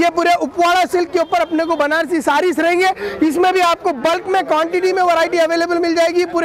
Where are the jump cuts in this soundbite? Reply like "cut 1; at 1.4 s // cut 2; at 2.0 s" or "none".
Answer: none